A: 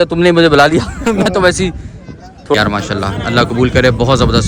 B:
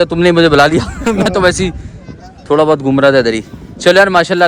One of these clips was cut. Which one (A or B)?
A